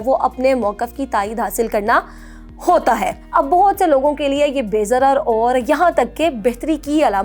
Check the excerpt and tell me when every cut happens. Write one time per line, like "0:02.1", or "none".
0:03.1